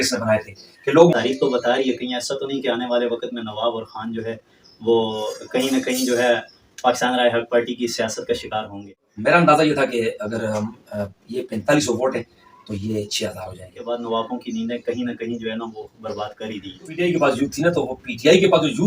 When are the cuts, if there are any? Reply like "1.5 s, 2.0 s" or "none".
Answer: 1.1 s, 8.8 s, 13.8 s, 16.9 s